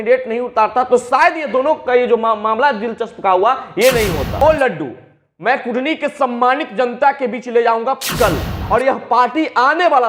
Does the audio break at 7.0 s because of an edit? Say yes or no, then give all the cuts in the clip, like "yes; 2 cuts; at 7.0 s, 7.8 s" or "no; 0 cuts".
no; 2 cuts; at 4.4 s, 8.6 s